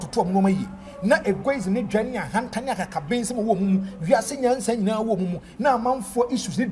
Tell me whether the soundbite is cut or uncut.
uncut